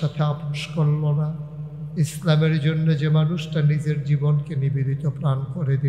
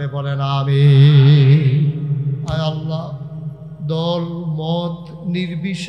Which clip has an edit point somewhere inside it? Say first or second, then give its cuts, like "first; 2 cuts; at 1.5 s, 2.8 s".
second; 1 cut; at 2.4 s